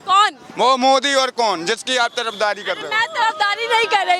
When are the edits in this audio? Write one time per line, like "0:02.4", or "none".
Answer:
none